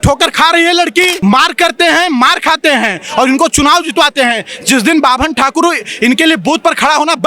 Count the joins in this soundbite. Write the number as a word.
one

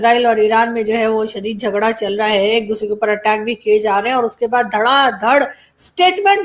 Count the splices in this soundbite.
zero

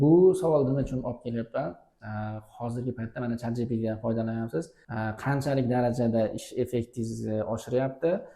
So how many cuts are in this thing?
one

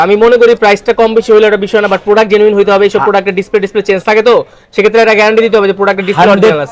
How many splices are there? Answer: zero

